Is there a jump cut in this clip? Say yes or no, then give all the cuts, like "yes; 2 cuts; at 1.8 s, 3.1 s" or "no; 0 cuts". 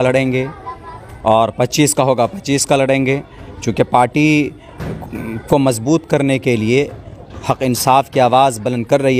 no; 0 cuts